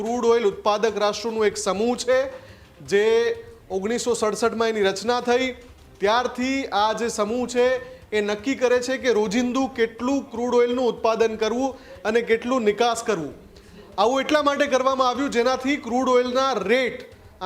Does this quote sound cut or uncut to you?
uncut